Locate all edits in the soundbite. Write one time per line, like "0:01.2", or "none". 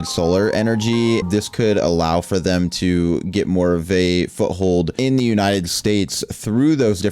0:01.2